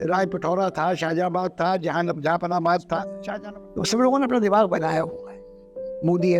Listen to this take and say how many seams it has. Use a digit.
1